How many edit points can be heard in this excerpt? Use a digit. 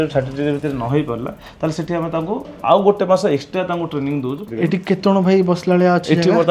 1